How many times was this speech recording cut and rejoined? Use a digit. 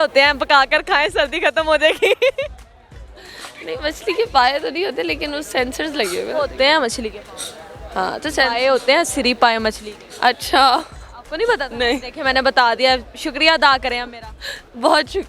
0